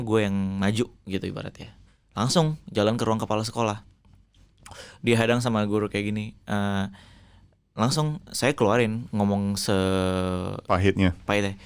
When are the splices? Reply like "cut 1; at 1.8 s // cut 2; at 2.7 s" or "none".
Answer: none